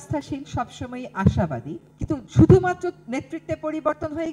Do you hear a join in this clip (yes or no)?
yes